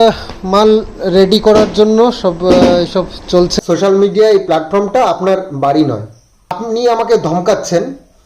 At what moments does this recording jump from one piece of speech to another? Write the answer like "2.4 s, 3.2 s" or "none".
3.5 s, 6.6 s